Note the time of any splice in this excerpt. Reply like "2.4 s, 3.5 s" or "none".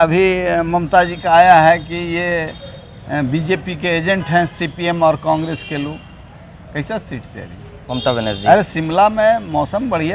none